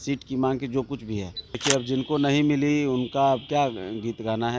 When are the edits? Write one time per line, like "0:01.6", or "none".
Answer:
0:01.5